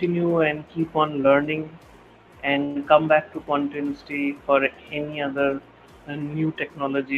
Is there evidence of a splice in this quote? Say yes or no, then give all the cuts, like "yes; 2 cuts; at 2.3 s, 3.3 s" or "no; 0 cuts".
no; 0 cuts